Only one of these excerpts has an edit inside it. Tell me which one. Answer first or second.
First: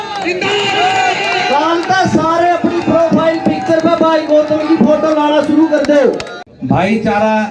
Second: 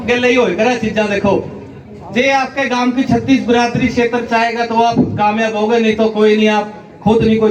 first